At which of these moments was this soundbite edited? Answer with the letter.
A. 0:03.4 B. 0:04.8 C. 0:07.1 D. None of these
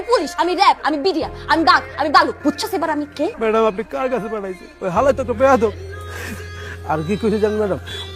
A